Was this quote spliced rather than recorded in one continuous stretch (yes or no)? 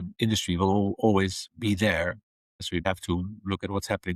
yes